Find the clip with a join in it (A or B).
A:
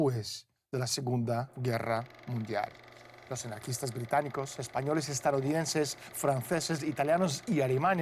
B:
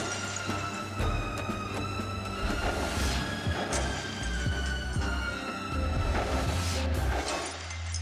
A